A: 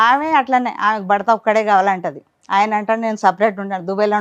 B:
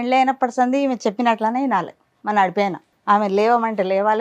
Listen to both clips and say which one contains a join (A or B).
B